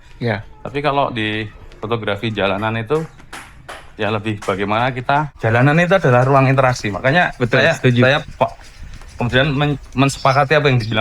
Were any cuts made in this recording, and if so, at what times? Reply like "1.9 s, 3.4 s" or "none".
5.3 s